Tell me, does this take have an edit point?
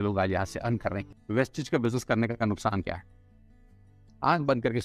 yes; 1 cut; at 1.0 s

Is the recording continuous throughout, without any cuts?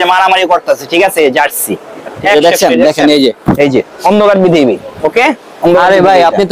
no; 1 cut; at 2.1 s

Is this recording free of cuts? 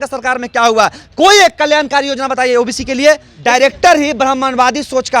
no; 1 cut; at 3.3 s

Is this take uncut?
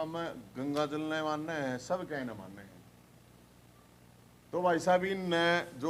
yes; 0 cuts

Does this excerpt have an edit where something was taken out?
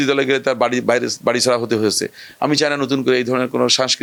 no; 0 cuts

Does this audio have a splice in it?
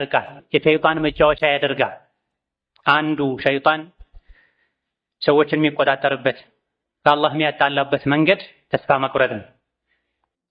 yes; 1 cut; at 8.5 s

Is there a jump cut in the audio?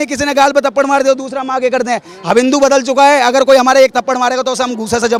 no; 0 cuts

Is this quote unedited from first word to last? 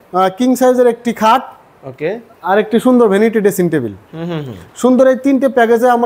yes; 0 cuts

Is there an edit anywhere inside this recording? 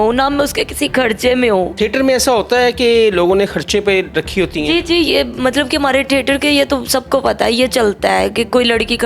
yes; 1 cut; at 1.7 s

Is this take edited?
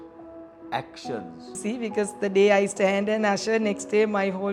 yes; 1 cut; at 1.6 s

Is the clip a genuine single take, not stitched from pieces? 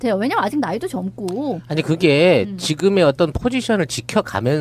yes; 0 cuts

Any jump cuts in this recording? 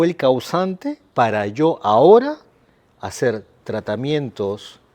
yes; 1 cut; at 1.0 s

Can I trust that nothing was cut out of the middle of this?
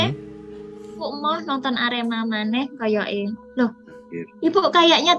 yes; 0 cuts

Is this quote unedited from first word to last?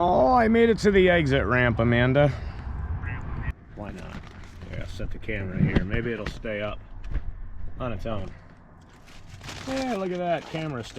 no; 1 cut; at 3.5 s

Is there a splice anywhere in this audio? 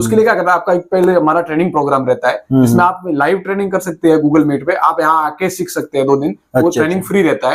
no; 0 cuts

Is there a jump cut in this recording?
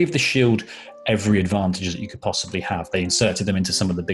no; 0 cuts

